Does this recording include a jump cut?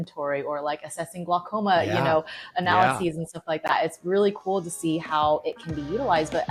no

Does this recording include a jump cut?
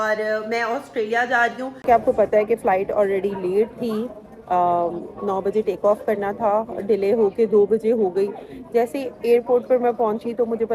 yes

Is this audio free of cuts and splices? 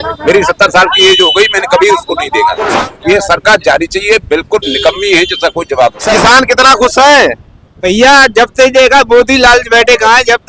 no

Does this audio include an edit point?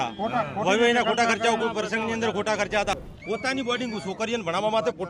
yes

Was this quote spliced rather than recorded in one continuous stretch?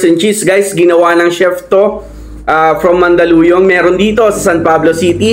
no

